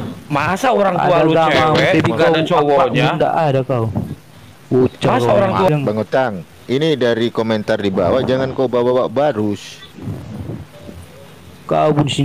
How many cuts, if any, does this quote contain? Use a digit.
1